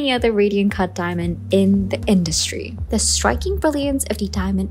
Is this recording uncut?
no; 1 cut; at 2.7 s

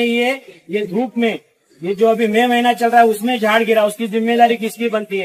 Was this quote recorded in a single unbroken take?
yes; 0 cuts

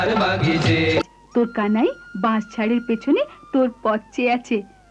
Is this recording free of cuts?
no; 1 cut; at 1.0 s

